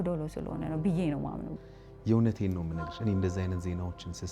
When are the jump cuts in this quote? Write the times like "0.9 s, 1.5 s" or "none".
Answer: 1.5 s